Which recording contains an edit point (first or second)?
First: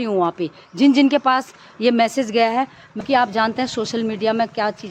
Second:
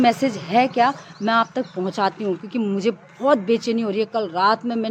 first